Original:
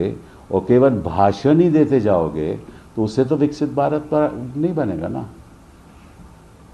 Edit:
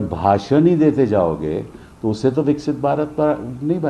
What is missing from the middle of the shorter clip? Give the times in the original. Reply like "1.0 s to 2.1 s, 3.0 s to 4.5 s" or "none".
none